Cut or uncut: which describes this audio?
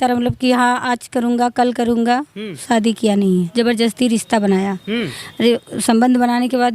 cut